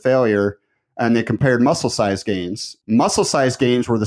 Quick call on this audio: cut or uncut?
uncut